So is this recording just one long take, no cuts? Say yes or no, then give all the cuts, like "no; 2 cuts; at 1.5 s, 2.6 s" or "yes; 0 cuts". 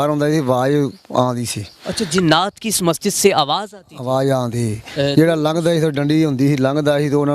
yes; 0 cuts